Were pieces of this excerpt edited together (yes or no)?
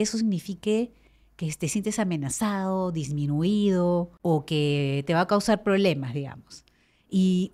yes